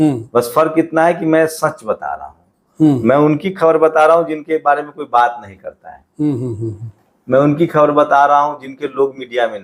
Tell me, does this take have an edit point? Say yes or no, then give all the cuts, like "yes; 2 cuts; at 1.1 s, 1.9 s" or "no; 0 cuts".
no; 0 cuts